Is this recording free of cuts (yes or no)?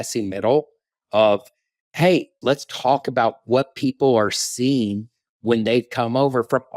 no